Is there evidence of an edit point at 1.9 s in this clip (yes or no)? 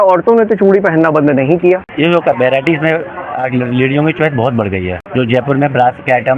yes